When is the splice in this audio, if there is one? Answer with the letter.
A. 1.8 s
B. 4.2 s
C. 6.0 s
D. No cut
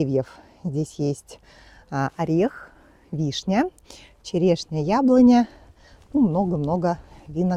D